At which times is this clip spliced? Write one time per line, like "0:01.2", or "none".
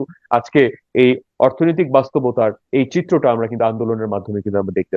0:02.6